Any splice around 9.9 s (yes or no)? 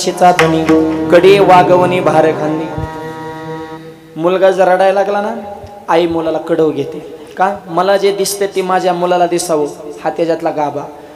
no